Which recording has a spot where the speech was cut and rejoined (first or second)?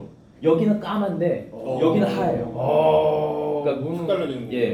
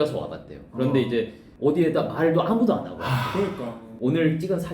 second